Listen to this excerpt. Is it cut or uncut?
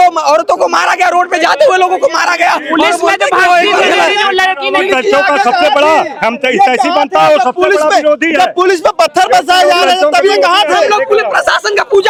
uncut